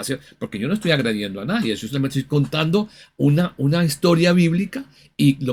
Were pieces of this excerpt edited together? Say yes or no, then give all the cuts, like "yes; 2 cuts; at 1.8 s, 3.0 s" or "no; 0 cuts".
no; 0 cuts